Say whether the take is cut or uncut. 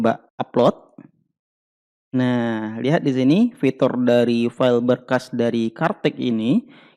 uncut